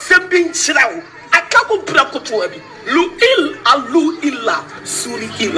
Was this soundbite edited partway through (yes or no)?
no